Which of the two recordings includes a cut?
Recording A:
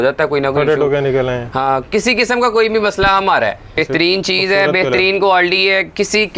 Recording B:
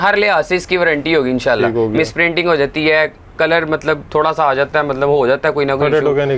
A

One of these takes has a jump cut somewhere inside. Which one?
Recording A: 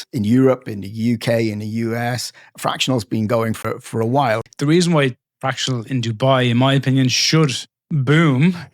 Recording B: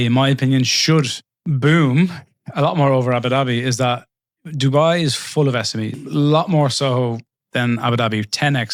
A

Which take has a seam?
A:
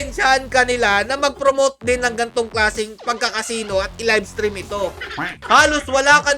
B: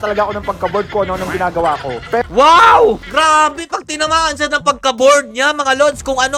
A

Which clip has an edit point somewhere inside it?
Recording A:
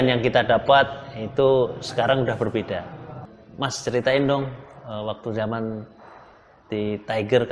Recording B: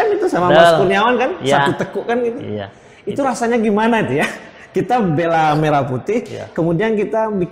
A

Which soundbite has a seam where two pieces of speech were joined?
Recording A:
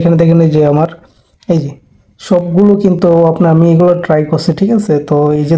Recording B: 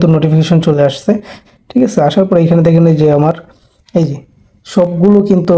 B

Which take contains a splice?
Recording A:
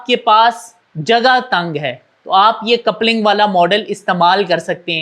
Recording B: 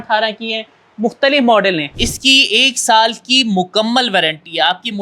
B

